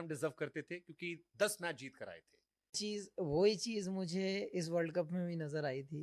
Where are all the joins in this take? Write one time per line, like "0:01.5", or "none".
0:02.8